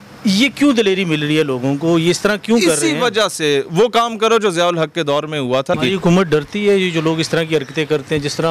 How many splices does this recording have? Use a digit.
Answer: 1